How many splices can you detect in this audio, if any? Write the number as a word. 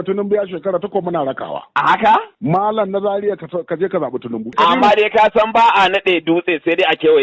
two